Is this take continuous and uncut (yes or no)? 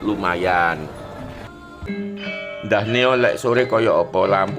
no